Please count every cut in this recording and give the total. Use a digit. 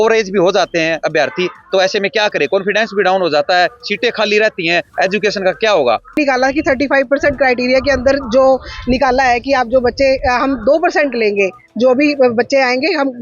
1